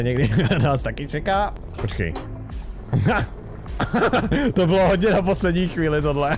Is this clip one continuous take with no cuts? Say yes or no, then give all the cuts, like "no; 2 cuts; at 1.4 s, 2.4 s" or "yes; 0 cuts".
no; 1 cut; at 1.6 s